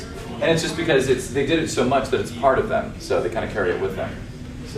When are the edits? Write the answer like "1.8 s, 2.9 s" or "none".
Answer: 3.8 s